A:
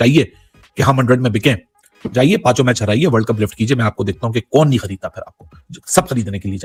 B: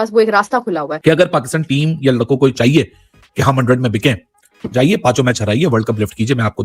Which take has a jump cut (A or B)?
B